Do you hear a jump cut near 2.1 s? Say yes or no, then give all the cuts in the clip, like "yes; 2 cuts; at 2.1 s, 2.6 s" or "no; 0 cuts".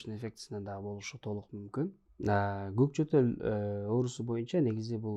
yes; 1 cut; at 2.1 s